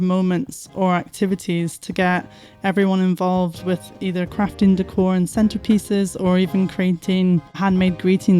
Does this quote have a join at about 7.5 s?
yes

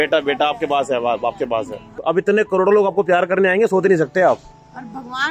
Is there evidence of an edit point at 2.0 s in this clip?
yes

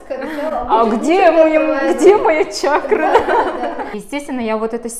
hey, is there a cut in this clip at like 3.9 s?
yes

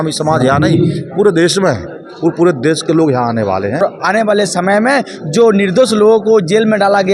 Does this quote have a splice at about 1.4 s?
no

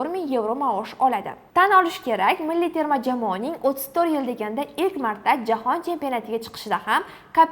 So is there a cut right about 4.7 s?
no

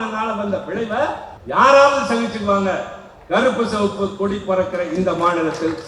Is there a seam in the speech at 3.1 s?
no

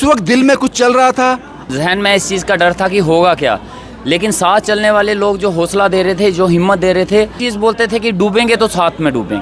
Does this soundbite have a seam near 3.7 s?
no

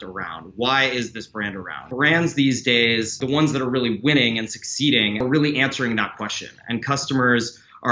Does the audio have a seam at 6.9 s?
no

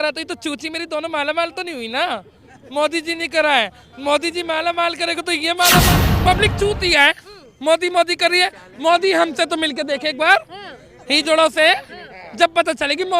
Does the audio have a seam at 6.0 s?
yes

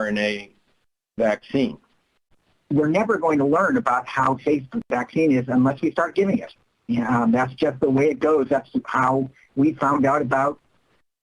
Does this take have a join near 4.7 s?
no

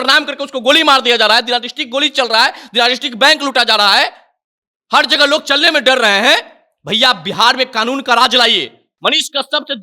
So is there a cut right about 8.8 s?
yes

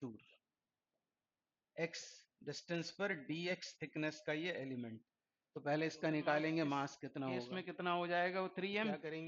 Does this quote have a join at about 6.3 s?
no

